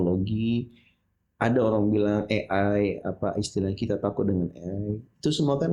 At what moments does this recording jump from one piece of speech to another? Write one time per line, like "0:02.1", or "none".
none